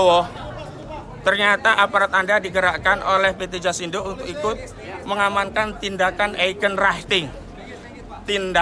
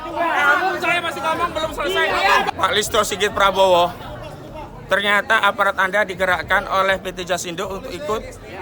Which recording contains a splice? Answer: second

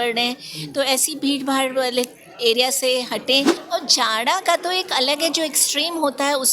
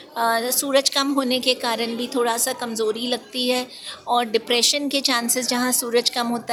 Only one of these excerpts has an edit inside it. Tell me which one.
first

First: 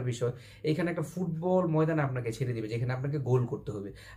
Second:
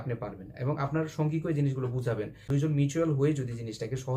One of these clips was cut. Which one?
second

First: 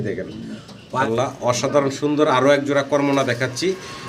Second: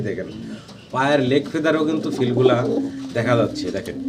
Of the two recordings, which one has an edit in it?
first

